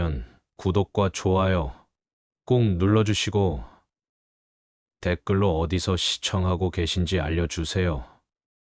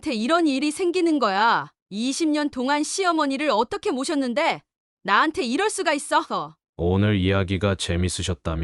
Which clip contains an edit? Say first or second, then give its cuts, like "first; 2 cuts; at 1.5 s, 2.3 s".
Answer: second; 1 cut; at 6.6 s